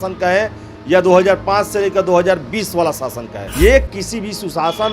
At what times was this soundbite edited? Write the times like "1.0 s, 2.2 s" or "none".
3.5 s